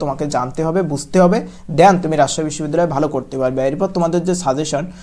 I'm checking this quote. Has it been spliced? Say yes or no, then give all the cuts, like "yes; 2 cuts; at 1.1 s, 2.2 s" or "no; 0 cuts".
no; 0 cuts